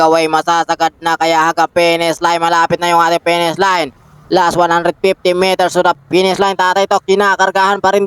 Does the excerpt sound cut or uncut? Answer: cut